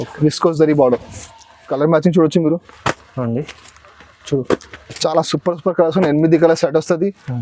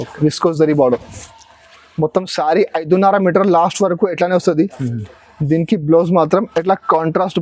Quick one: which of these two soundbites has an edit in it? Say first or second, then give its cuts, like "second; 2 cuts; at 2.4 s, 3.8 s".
first; 1 cut; at 1.7 s